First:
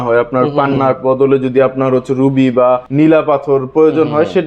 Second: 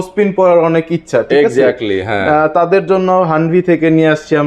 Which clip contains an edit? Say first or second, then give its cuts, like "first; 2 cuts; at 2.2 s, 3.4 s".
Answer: first; 1 cut; at 2.9 s